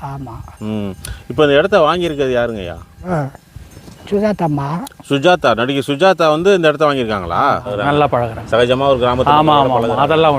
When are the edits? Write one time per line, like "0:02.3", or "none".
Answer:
0:03.0
0:07.7